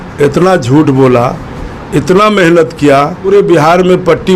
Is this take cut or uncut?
cut